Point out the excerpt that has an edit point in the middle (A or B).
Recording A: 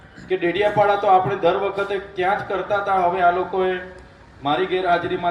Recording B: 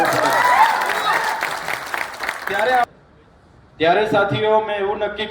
B